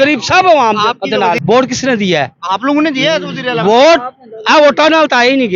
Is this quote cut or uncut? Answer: cut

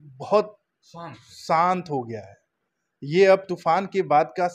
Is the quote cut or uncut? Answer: uncut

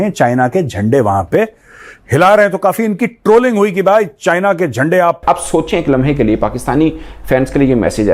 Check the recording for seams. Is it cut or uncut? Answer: cut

